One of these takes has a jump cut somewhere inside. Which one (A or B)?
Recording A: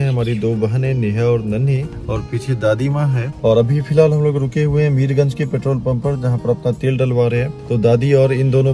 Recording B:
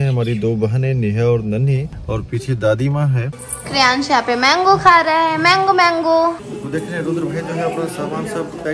B